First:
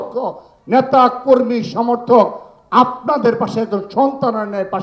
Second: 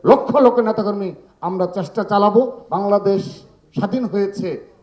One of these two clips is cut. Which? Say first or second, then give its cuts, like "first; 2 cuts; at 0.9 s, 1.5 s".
second; 1 cut; at 2.6 s